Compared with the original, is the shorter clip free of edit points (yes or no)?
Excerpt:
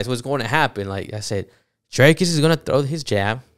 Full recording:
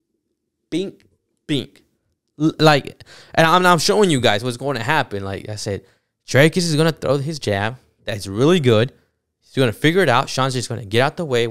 yes